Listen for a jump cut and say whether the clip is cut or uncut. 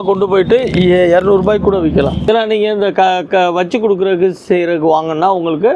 cut